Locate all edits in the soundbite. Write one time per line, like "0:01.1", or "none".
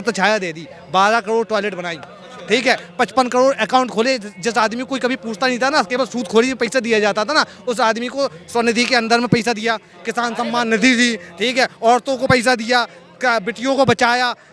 none